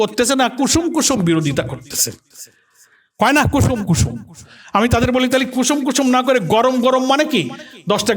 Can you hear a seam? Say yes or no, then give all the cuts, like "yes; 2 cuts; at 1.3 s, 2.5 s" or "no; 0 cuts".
no; 0 cuts